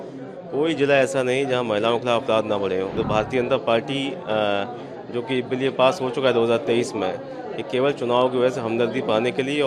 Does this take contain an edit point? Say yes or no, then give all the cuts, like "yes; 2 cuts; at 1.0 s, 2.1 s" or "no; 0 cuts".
yes; 1 cut; at 3.0 s